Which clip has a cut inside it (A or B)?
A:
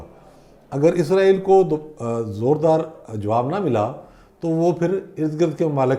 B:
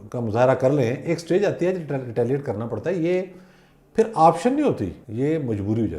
B